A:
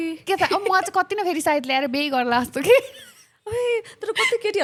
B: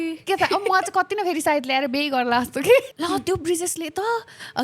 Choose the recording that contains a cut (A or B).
B